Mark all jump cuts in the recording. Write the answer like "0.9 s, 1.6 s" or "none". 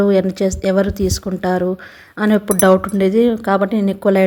none